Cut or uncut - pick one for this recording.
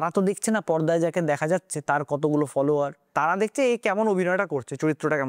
cut